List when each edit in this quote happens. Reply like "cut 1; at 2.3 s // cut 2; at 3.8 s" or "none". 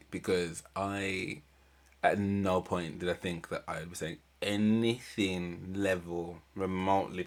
none